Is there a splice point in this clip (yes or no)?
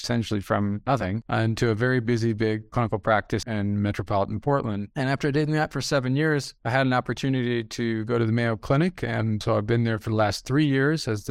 yes